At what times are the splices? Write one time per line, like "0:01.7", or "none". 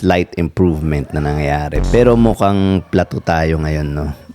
0:01.8